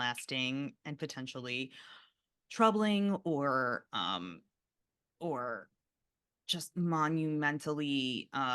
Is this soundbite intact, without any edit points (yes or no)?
yes